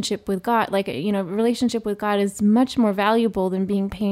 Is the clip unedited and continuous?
yes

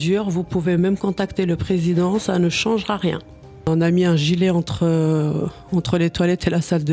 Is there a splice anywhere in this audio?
yes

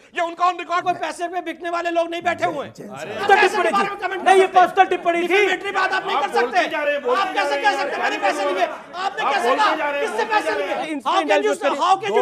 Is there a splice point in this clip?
yes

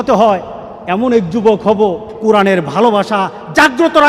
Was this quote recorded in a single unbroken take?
no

